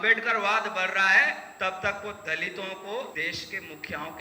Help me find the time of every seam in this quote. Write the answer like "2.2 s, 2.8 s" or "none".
3.1 s